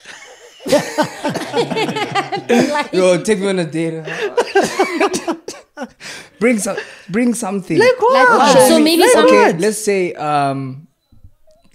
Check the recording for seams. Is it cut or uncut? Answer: uncut